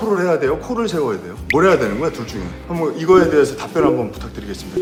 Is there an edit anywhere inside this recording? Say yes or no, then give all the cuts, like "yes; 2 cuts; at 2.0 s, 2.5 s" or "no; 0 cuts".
no; 0 cuts